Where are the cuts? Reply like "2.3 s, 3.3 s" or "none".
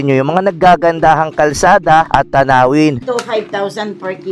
2.1 s, 2.9 s

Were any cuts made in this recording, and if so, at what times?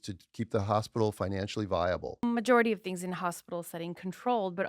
2.2 s

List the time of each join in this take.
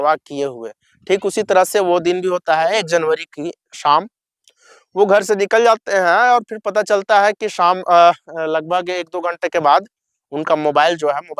none

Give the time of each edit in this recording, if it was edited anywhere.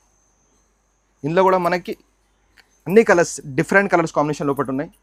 none

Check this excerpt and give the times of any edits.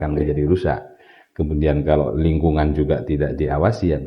none

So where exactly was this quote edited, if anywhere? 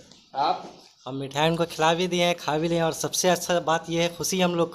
none

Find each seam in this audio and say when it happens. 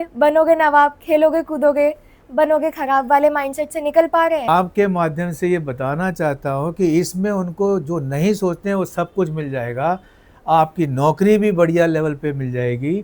4.1 s

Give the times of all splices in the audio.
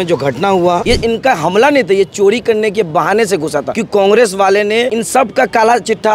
0.8 s, 3.8 s, 5.0 s

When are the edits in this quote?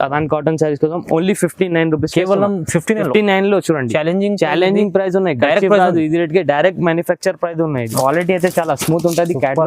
7.9 s

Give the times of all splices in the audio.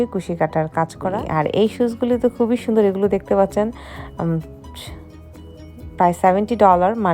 1.2 s, 4.4 s, 6.0 s

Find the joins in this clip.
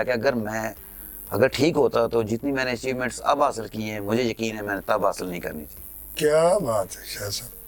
none

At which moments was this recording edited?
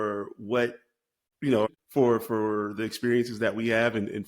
1.5 s

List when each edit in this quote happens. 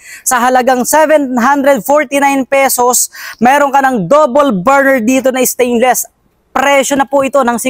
none

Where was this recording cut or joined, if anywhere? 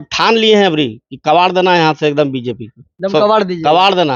none

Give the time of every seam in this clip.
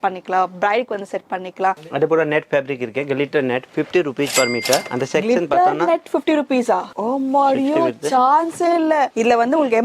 1.8 s, 6.9 s, 9.1 s

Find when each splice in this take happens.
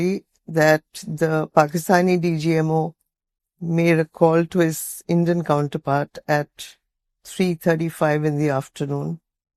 none

